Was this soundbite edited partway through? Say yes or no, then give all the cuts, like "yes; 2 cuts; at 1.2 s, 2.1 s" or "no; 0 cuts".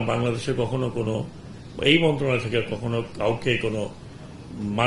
no; 0 cuts